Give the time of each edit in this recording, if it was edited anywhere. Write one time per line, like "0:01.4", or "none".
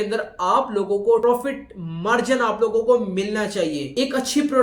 0:01.2